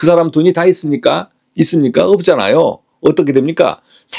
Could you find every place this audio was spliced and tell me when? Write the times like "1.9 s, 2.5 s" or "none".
none